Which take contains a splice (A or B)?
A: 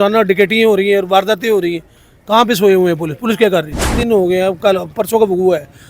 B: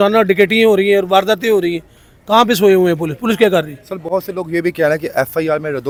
A